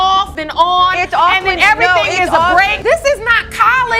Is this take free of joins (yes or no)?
no